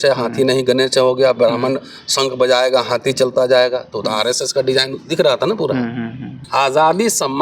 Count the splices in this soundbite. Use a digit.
1